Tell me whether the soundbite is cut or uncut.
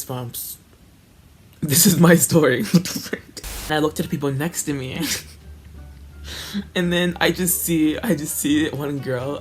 cut